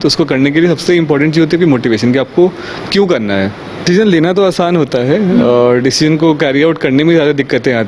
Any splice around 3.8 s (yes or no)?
yes